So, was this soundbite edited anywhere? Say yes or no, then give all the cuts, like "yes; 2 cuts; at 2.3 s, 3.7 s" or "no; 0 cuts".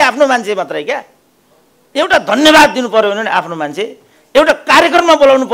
no; 0 cuts